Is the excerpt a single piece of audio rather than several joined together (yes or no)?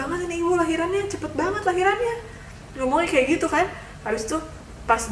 yes